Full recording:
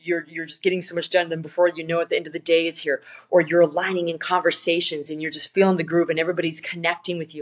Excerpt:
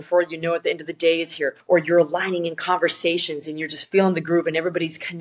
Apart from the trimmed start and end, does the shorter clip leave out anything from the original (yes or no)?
yes